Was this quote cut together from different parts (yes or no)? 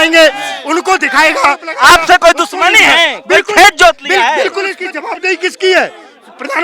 yes